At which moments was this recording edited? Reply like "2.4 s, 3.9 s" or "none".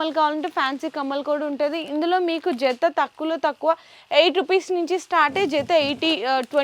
none